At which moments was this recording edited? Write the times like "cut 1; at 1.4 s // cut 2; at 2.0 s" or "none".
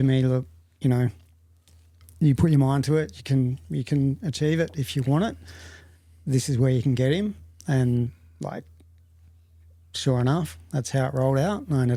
none

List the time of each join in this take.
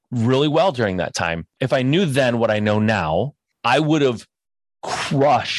cut 1; at 1.6 s // cut 2; at 3.4 s

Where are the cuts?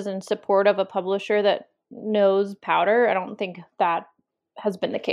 none

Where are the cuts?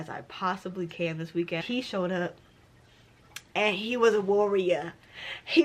cut 1; at 1.6 s

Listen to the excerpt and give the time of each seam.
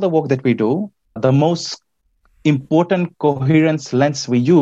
cut 1; at 1.2 s

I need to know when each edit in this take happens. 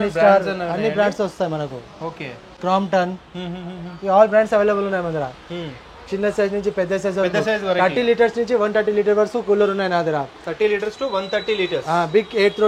none

